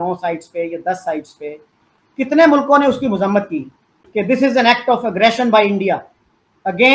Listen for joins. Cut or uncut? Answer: uncut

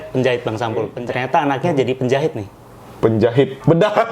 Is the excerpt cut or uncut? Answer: cut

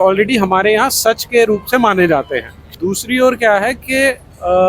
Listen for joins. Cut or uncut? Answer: cut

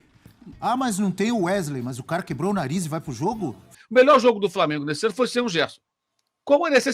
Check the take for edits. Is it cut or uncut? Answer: cut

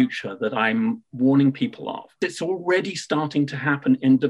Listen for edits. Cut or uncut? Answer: cut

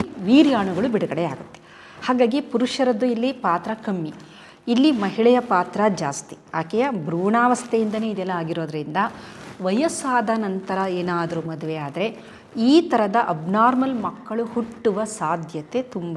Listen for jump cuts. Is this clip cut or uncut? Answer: uncut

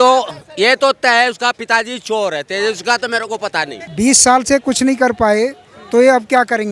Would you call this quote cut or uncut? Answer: cut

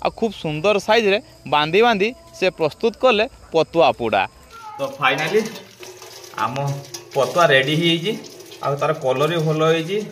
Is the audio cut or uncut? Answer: cut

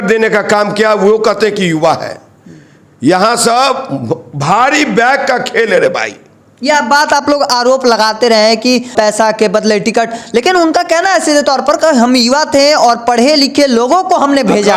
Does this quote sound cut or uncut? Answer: uncut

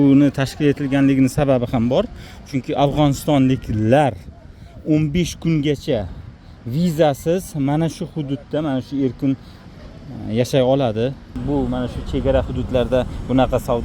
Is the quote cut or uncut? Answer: cut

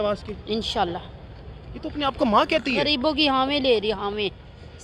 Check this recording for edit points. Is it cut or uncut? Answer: uncut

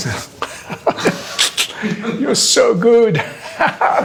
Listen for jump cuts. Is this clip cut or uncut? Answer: uncut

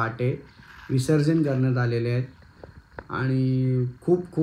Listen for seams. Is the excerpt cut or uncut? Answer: uncut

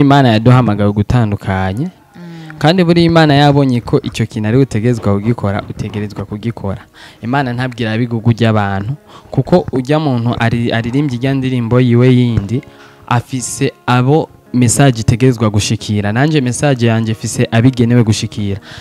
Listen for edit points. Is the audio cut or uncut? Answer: uncut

